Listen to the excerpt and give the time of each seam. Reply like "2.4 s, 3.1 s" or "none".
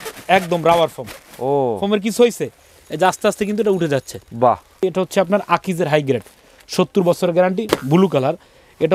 4.8 s

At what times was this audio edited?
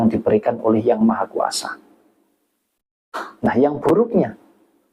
none

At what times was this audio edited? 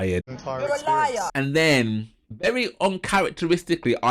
1.3 s

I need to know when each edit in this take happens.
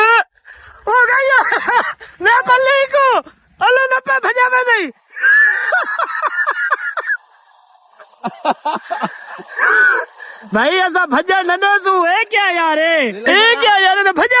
13.2 s

